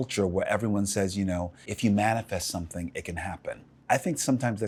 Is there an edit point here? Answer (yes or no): no